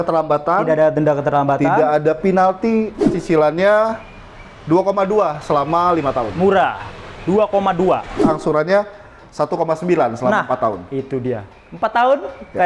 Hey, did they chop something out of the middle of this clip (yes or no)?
yes